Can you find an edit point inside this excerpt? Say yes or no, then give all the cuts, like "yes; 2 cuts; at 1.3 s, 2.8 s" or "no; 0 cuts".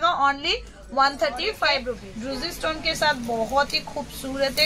yes; 1 cut; at 2.1 s